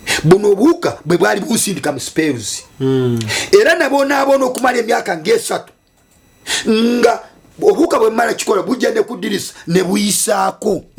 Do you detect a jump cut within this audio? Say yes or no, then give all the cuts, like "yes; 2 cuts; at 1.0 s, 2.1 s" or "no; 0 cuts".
no; 0 cuts